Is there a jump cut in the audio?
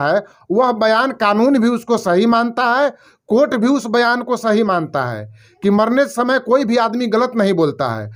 no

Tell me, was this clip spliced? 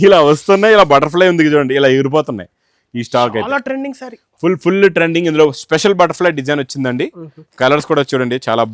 no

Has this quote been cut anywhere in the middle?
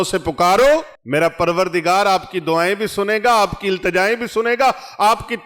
yes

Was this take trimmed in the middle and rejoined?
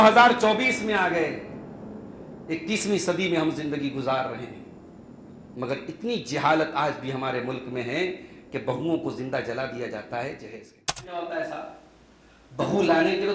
yes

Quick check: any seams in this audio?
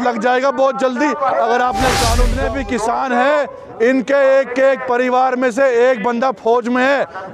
yes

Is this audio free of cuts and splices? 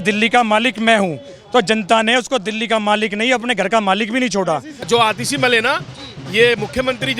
no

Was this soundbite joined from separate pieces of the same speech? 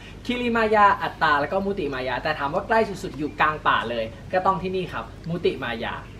no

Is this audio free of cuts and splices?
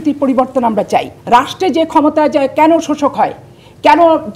no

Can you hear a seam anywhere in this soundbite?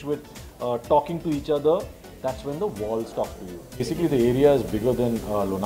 yes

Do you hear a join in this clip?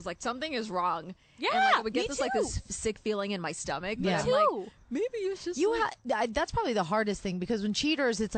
no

